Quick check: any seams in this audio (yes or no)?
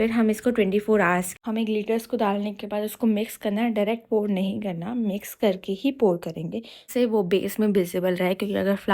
yes